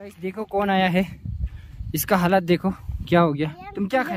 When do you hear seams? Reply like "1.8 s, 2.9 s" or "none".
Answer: none